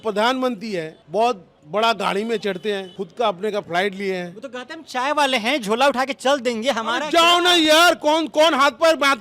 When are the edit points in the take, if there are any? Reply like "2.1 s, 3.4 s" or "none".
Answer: 1.0 s, 1.5 s, 3.0 s